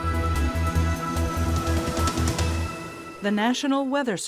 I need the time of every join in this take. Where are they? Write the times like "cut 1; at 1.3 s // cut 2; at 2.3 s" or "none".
none